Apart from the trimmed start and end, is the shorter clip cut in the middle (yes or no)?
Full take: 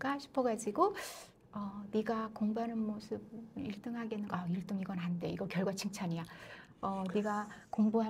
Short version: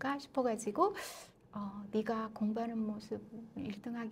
no